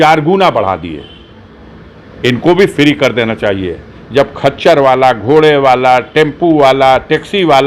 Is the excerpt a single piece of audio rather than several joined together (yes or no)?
yes